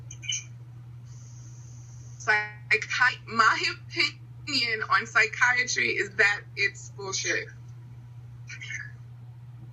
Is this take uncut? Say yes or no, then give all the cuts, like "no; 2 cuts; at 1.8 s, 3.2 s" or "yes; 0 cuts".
no; 1 cut; at 7.6 s